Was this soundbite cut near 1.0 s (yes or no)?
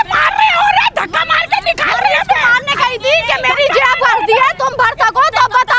no